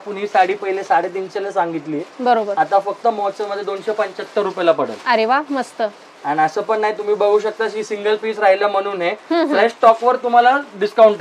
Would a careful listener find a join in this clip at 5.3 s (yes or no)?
no